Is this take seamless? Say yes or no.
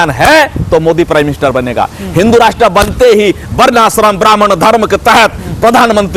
yes